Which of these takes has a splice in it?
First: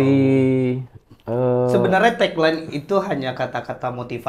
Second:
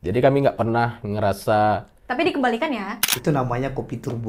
second; 1 cut; at 3.1 s

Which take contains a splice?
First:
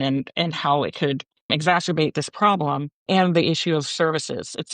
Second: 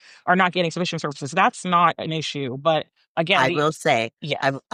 first; 2 cuts; at 1.5 s, 3.0 s

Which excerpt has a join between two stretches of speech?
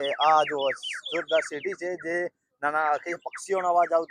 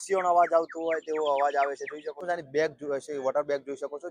second; 1 cut; at 2.2 s

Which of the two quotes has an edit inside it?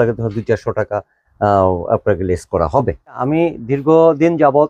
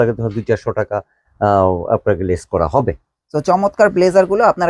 first; 1 cut; at 3.2 s

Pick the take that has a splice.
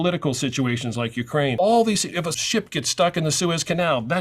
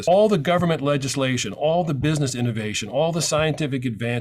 first; 2 cuts; at 1.5 s, 2.4 s

